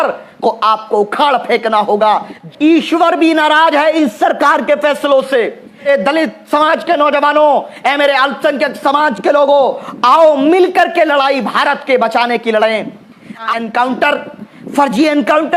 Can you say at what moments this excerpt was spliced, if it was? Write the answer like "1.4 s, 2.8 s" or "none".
2.4 s, 5.9 s, 13.5 s